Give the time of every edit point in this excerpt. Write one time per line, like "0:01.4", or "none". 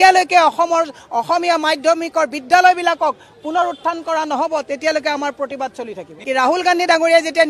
0:06.2